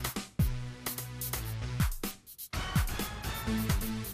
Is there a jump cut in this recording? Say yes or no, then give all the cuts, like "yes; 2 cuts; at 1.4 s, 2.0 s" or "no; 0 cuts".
yes; 1 cut; at 2.3 s